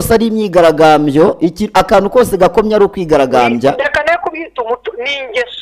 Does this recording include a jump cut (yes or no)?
no